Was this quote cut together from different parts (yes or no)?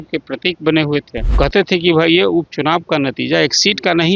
yes